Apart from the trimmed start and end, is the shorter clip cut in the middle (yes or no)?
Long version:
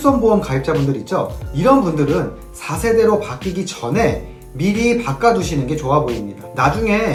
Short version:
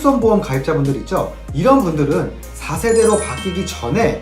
no